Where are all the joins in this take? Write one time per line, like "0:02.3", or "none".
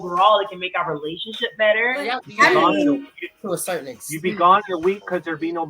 0:02.2